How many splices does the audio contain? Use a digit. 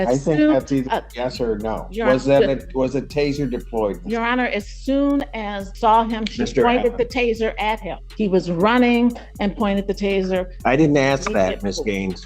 2